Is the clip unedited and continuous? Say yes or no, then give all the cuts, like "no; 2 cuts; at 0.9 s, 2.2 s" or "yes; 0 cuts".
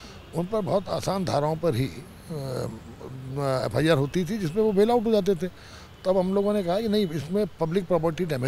yes; 0 cuts